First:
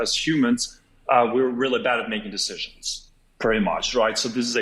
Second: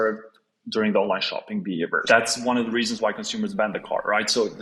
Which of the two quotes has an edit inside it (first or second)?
second